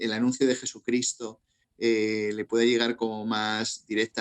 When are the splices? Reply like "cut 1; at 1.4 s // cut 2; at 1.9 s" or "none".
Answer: none